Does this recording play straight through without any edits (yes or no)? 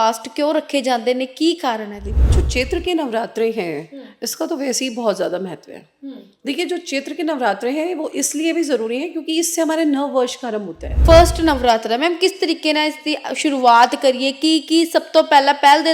no